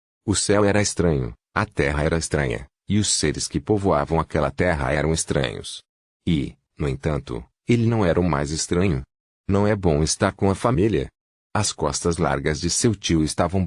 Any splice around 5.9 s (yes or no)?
no